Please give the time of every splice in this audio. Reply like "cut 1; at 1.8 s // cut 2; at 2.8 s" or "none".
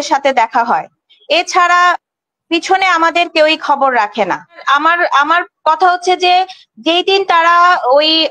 cut 1; at 4.6 s